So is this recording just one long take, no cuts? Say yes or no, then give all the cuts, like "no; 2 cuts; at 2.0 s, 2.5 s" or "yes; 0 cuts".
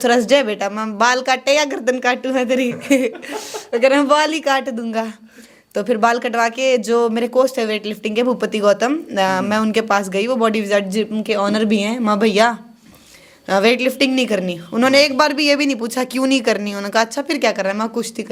yes; 0 cuts